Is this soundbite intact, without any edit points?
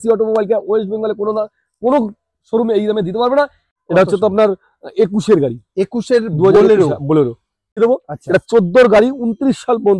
no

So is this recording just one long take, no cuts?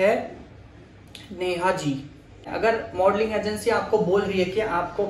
no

